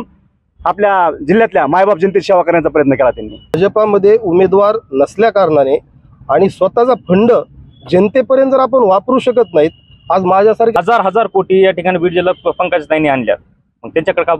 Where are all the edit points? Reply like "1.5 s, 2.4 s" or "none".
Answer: 3.6 s, 10.7 s